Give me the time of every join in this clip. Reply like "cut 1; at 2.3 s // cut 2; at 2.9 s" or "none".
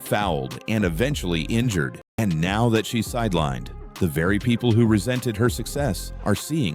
cut 1; at 2.0 s